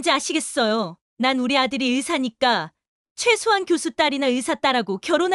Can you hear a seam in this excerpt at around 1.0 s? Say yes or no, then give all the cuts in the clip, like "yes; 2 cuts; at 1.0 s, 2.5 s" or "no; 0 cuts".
yes; 1 cut; at 1.0 s